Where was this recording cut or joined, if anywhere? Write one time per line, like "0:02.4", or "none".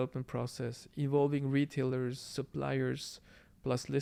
none